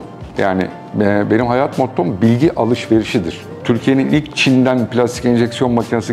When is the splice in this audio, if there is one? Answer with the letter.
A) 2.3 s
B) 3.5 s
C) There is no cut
B